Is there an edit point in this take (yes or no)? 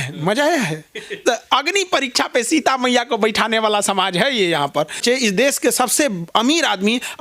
yes